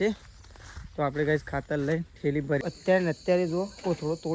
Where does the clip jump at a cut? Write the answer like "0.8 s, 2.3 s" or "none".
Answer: 2.6 s